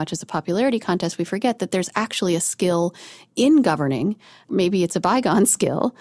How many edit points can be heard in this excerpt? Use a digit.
0